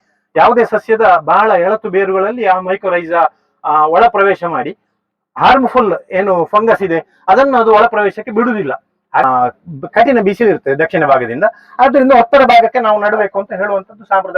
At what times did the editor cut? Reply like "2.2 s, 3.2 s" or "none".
9.2 s